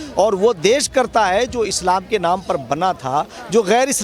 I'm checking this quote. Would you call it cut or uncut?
uncut